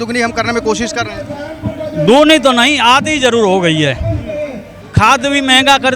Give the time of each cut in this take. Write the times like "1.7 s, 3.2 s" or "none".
4.7 s